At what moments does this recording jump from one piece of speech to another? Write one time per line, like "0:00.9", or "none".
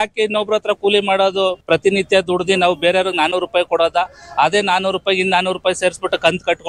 0:01.6